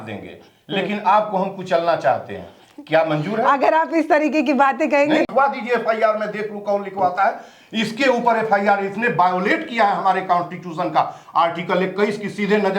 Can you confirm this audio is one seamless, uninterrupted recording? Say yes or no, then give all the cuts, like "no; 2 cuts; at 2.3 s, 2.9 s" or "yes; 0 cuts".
no; 1 cut; at 5.3 s